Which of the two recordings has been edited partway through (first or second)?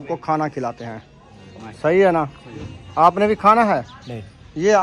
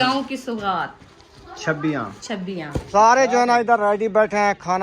second